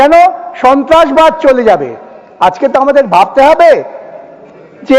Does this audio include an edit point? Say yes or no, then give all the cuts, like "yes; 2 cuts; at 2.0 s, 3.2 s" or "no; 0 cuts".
no; 0 cuts